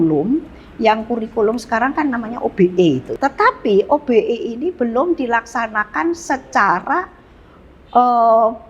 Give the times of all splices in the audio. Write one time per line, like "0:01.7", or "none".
0:03.1